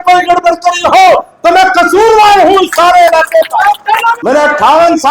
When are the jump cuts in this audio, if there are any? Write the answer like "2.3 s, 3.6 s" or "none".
4.2 s